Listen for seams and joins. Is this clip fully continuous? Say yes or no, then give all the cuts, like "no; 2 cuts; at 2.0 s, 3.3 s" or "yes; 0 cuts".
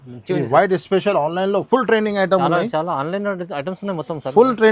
yes; 0 cuts